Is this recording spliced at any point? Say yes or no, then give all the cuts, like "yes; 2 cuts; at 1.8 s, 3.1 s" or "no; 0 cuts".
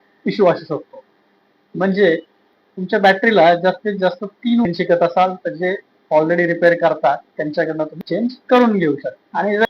yes; 1 cut; at 4.7 s